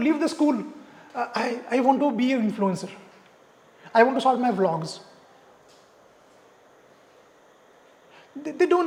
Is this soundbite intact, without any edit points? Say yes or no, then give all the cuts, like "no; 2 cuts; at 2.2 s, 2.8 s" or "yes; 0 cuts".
yes; 0 cuts